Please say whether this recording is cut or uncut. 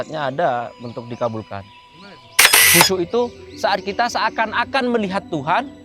cut